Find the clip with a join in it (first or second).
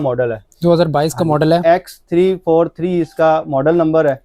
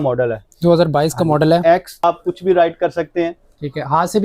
second